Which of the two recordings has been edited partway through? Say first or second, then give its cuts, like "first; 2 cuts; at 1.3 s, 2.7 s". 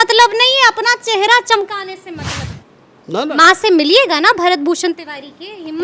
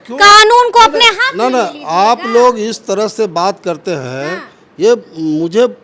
first; 1 cut; at 2.3 s